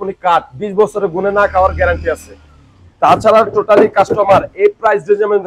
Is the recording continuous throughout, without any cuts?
yes; 0 cuts

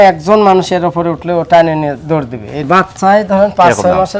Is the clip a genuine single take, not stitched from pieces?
no; 1 cut; at 2.7 s

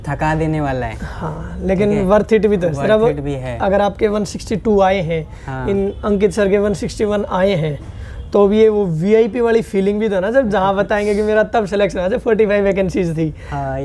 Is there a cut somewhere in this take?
no; 0 cuts

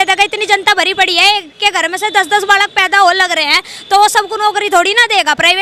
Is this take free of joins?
yes; 0 cuts

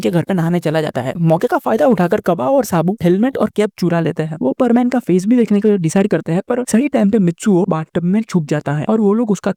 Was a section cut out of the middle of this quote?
no; 0 cuts

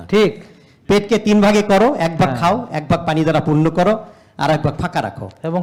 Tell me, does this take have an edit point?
no; 0 cuts

